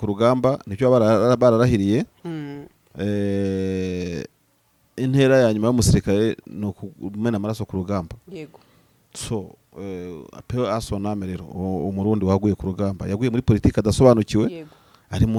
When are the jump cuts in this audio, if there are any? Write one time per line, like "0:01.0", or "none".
none